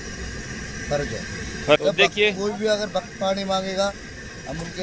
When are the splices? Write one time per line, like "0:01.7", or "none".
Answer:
0:01.8